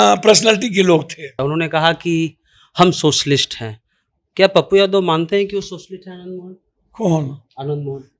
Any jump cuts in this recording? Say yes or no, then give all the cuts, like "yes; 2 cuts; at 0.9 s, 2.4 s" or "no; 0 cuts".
yes; 1 cut; at 1.4 s